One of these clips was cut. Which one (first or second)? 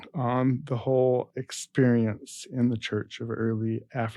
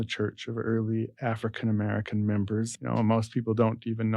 second